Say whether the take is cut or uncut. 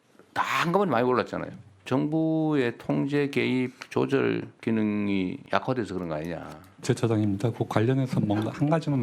cut